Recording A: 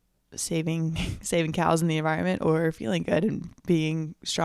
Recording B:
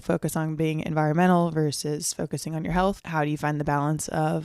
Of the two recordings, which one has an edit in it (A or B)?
B